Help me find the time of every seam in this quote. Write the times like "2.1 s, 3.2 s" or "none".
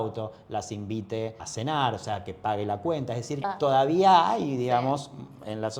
1.4 s, 3.5 s